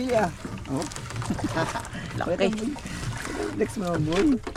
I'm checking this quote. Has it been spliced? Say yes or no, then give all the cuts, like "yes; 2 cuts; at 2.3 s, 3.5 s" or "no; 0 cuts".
no; 0 cuts